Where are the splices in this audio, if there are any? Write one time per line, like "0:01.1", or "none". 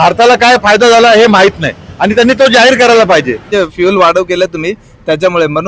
0:03.5